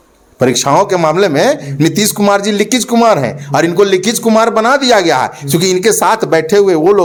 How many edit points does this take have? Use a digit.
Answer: 0